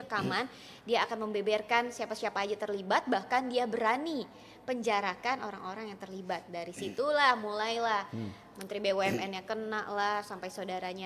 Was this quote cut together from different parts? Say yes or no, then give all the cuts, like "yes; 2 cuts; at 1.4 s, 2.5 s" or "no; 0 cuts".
no; 0 cuts